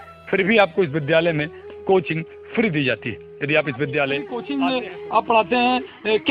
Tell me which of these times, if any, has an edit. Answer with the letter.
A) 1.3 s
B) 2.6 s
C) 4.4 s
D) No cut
C